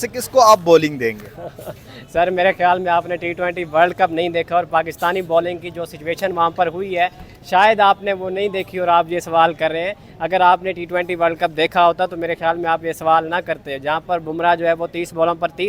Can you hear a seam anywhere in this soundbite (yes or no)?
no